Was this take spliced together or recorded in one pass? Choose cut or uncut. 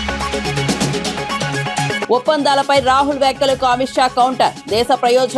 cut